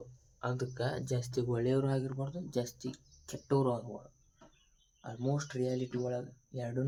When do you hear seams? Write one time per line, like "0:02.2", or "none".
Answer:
none